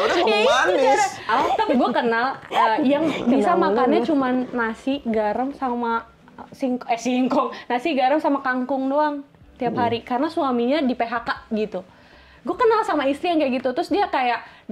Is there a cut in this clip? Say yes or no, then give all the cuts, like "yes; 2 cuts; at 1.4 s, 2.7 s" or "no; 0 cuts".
yes; 1 cut; at 1.3 s